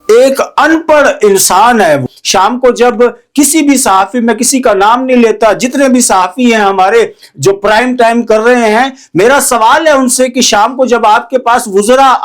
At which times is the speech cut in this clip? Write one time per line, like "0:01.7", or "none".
0:02.2